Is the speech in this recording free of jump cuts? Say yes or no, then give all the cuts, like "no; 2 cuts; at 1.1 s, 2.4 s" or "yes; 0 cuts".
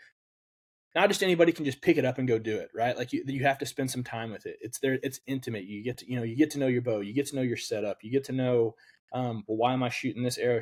yes; 0 cuts